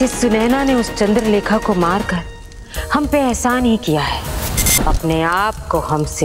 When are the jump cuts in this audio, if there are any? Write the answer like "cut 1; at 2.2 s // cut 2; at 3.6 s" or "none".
none